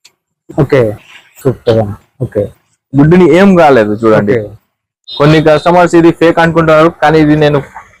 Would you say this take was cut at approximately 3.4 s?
no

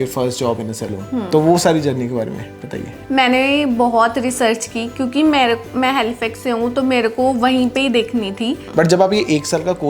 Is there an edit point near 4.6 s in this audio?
no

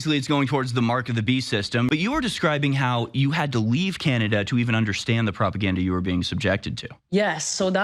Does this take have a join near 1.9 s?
yes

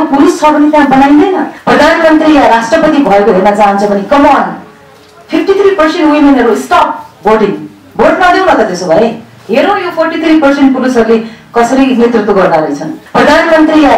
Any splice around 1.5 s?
yes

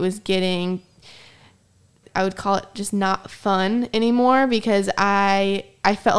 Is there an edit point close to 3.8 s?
no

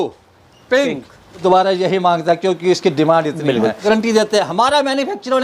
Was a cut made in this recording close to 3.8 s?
yes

